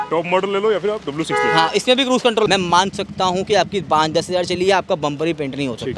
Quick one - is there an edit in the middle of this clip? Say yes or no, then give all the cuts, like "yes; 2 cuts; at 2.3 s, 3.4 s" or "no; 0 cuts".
yes; 1 cut; at 2.5 s